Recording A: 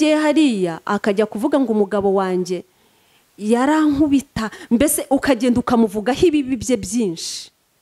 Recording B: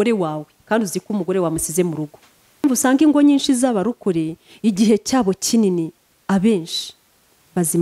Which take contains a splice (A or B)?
B